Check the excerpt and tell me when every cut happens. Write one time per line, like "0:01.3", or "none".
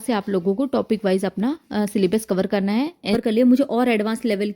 0:03.1